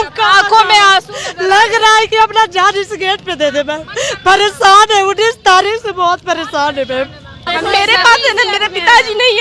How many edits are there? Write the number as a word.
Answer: one